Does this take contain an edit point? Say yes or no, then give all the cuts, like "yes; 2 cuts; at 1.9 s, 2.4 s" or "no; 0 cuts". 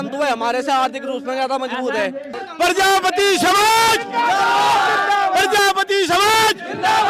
yes; 1 cut; at 2.4 s